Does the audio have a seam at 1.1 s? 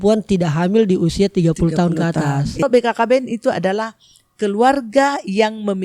no; 1 cut; at 2.6 s

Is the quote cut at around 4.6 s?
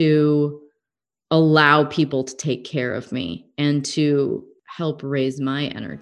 yes; 1 cut; at 4.6 s

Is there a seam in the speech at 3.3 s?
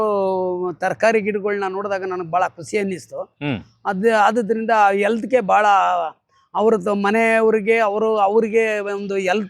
no; 0 cuts

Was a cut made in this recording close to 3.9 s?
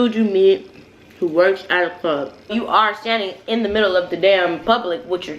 no; 1 cut; at 2.5 s

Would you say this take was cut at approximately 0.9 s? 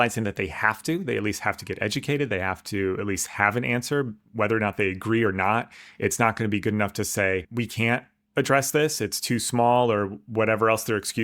no; 1 cut; at 7.5 s

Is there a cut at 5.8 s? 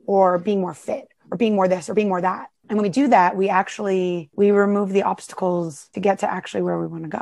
yes; 3 cuts; at 2.5 s, 4.3 s, 5.8 s

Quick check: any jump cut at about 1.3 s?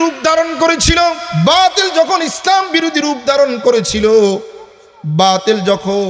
yes; 1 cut; at 1.3 s

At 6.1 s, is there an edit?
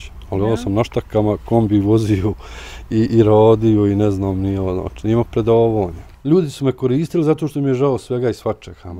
yes; 1 cut; at 6.1 s

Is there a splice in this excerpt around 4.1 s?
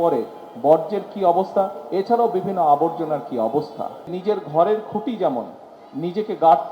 yes; 1 cut; at 4.1 s

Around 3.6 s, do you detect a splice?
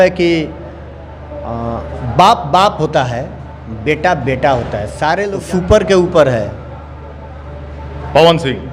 no; 1 cut; at 5.3 s

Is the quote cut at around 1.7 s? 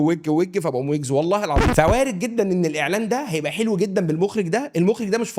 yes; 1 cut; at 1.7 s

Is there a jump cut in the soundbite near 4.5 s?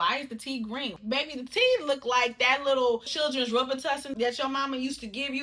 no; 2 cuts; at 1.0 s, 3.1 s

